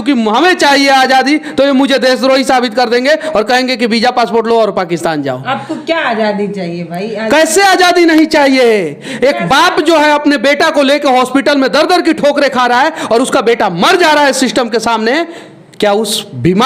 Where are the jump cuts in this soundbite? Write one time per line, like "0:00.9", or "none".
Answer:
none